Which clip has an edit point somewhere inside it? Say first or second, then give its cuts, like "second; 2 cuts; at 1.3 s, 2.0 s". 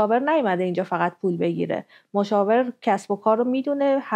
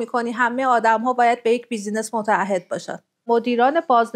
second; 1 cut; at 3.2 s